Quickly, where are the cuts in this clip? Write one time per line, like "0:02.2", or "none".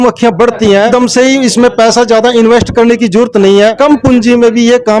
0:00.9
0:03.8